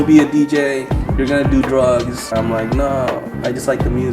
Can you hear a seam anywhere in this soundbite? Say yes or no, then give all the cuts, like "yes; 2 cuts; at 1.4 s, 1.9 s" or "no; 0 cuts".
yes; 1 cut; at 2.3 s